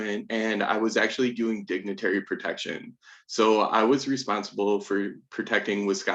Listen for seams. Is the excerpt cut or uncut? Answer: uncut